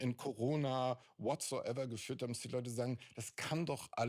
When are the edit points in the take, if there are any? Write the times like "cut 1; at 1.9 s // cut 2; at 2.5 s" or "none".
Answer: none